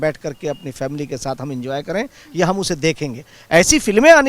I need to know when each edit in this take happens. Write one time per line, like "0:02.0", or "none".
0:03.3